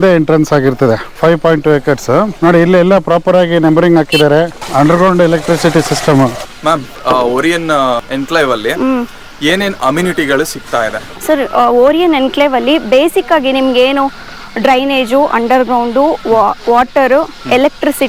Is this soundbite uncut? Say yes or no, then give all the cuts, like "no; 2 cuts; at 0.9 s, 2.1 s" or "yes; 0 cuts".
yes; 0 cuts